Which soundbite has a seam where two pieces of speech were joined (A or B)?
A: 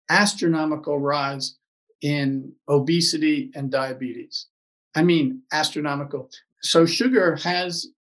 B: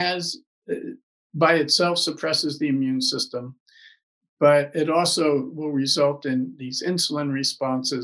A